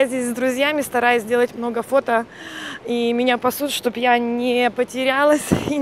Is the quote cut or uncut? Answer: uncut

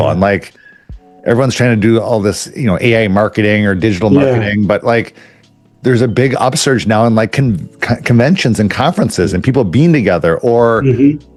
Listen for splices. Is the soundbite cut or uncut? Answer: uncut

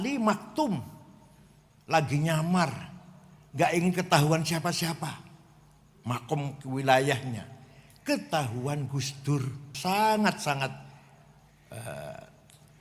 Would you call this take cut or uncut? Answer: cut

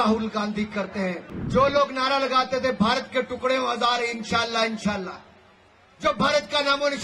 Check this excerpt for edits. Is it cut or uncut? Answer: cut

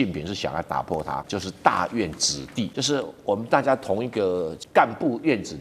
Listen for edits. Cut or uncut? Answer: cut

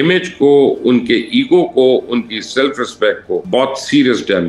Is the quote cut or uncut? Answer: cut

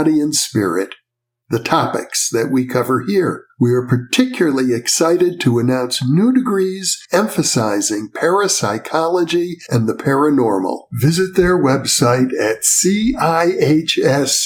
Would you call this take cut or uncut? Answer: uncut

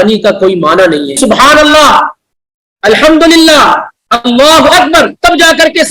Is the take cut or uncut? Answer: cut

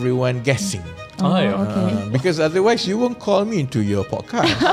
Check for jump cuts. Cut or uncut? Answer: uncut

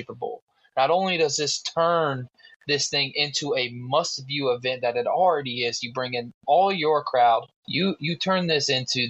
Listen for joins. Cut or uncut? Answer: cut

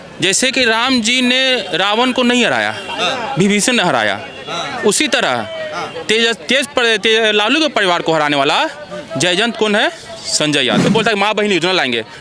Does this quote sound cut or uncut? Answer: cut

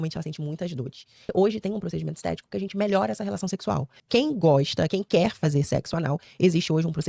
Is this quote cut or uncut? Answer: cut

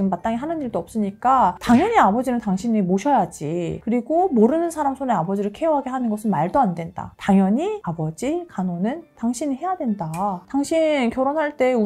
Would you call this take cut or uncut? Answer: uncut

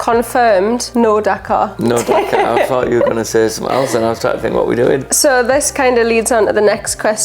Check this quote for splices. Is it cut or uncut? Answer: uncut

